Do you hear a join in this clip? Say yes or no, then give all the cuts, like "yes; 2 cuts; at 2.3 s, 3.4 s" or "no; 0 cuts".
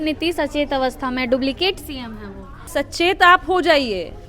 yes; 1 cut; at 2.7 s